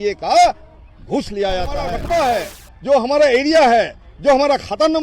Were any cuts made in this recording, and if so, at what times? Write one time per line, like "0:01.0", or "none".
0:01.9